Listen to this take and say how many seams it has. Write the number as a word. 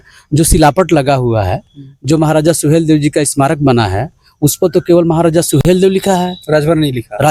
zero